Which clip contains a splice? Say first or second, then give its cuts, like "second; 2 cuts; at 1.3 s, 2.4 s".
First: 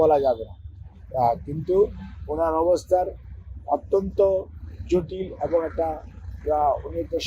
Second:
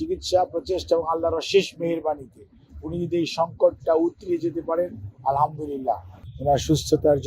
second; 1 cut; at 6.1 s